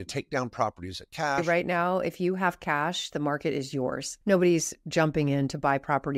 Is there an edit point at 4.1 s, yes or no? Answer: yes